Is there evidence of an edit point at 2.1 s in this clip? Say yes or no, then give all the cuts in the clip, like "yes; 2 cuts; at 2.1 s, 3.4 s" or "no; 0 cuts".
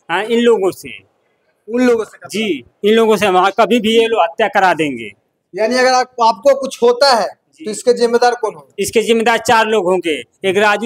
no; 0 cuts